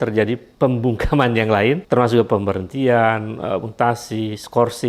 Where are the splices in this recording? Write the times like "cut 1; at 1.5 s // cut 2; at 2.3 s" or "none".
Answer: cut 1; at 1.8 s

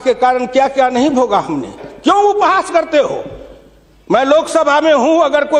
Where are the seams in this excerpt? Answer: cut 1; at 1.8 s

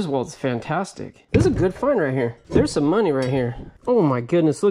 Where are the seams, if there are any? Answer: cut 1; at 1.1 s // cut 2; at 2.4 s // cut 3; at 3.6 s

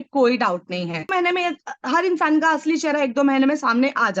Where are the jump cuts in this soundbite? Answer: cut 1; at 1.1 s

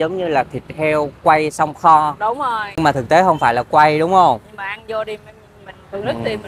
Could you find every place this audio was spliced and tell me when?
cut 1; at 2.6 s

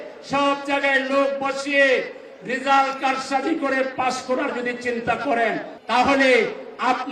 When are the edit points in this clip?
cut 1; at 5.7 s

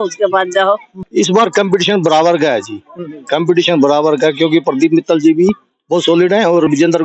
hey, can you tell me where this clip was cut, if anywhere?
cut 1; at 1.0 s

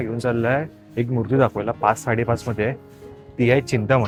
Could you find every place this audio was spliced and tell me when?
none

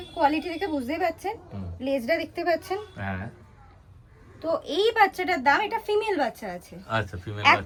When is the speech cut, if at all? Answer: none

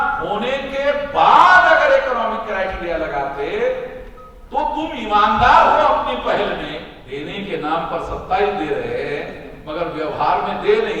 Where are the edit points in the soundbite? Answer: cut 1; at 6.9 s

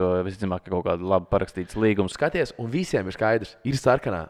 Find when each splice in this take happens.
cut 1; at 2.1 s

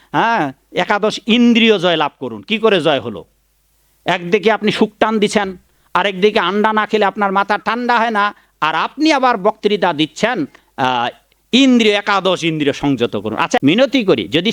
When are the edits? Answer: cut 1; at 13.6 s

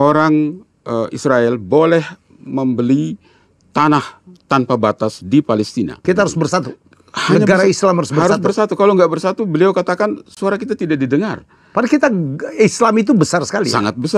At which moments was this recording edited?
cut 1; at 6.0 s

